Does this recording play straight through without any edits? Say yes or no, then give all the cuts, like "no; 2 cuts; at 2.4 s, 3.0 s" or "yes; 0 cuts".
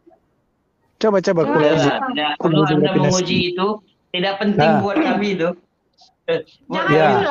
yes; 0 cuts